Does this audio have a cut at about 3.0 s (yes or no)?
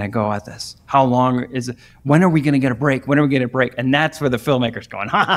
no